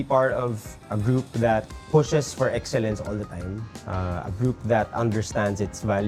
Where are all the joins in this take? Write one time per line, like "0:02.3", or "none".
none